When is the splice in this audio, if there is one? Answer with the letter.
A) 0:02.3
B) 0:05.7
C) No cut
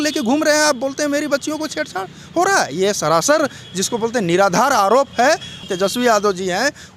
B